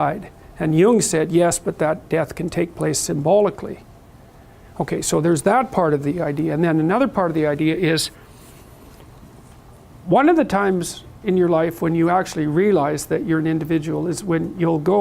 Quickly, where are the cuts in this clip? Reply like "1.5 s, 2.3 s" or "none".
4.2 s